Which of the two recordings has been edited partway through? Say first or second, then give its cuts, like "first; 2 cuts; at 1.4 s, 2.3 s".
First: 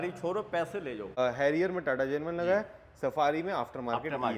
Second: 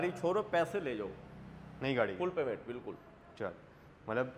first; 1 cut; at 1.2 s